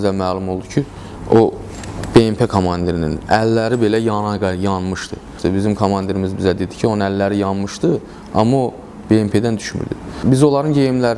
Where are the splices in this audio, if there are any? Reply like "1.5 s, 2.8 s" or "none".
5.3 s, 10.2 s